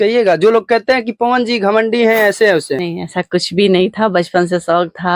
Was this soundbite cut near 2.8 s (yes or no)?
yes